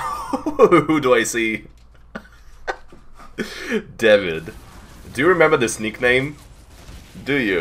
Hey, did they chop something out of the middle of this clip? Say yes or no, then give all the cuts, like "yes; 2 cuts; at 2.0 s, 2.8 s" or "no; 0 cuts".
no; 0 cuts